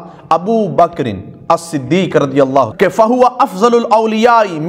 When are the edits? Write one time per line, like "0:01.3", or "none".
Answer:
0:02.7